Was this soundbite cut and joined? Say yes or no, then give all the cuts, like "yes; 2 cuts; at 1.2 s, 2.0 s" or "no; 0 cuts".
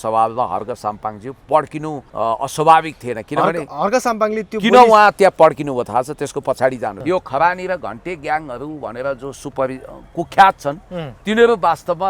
yes; 2 cuts; at 2.0 s, 7.0 s